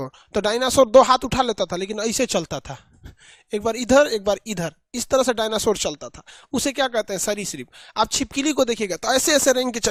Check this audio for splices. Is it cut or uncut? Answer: uncut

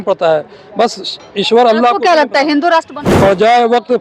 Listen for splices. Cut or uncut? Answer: cut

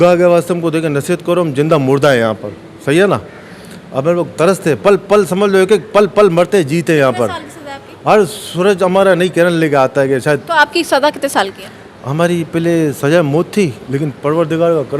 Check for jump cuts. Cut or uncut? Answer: uncut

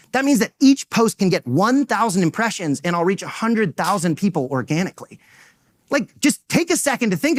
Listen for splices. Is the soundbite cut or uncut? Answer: uncut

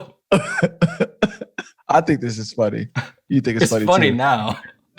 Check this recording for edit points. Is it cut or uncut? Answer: cut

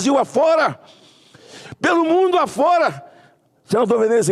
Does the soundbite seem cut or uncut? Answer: uncut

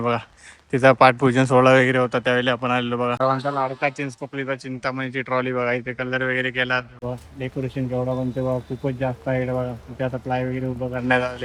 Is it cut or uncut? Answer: cut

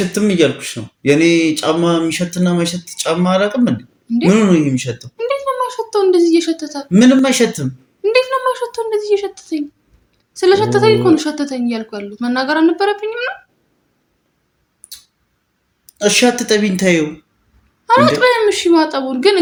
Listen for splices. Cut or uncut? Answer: uncut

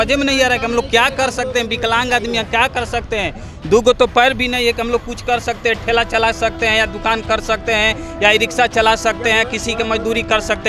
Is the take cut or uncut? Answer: uncut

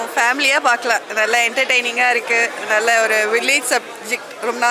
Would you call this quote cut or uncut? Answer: uncut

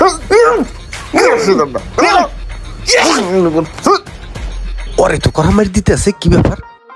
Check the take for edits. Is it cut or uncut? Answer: uncut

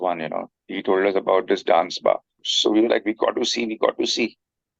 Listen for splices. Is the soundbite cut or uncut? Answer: cut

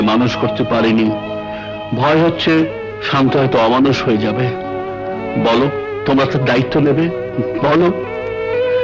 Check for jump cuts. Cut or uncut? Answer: uncut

